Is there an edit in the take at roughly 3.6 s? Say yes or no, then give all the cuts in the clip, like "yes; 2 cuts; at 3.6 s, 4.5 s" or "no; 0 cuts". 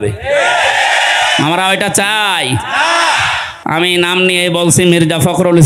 yes; 1 cut; at 3.6 s